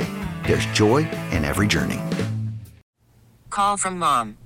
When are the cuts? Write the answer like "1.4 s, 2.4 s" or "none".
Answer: 2.8 s